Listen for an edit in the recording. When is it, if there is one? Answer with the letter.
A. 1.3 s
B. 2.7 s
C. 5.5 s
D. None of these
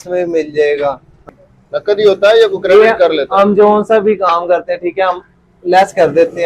A